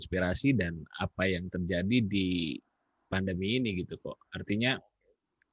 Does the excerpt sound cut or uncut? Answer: uncut